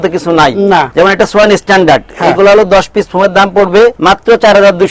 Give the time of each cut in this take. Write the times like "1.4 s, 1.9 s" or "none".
0.9 s, 4.0 s